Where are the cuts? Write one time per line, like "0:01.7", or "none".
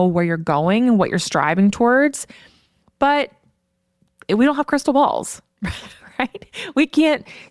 none